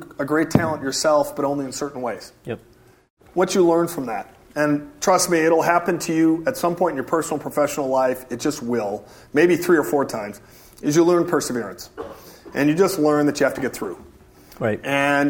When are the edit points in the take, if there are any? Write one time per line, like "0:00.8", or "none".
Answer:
0:03.1